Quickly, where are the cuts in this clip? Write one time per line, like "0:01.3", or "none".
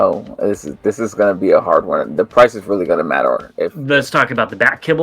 0:03.8